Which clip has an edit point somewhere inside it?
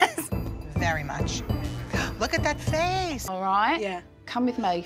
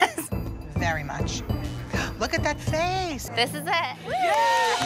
first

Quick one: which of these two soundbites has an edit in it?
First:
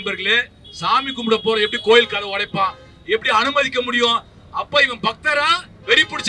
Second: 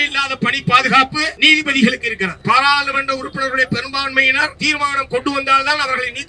second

